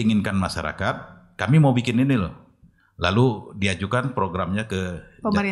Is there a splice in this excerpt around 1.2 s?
no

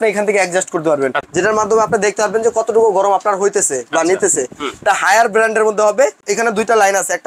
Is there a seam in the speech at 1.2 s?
yes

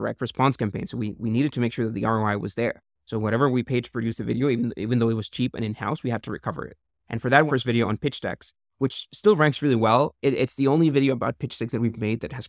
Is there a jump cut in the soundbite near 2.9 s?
no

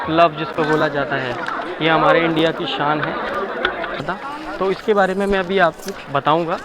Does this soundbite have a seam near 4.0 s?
yes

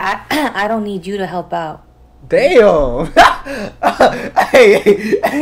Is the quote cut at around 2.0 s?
no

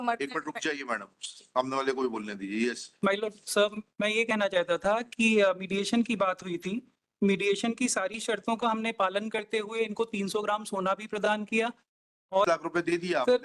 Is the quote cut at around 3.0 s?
no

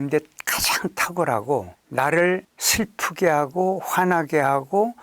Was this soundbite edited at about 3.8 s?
no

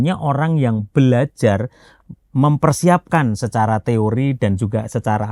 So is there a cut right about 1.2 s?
no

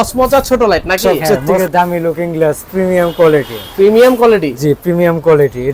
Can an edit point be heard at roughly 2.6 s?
no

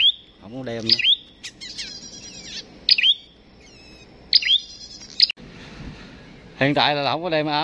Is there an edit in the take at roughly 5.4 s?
yes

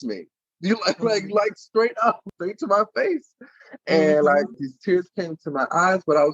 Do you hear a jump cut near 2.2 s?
yes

